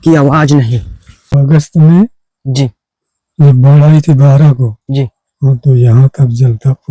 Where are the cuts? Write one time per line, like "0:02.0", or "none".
0:01.3